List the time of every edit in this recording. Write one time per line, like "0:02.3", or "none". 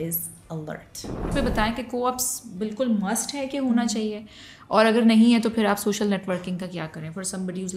0:01.3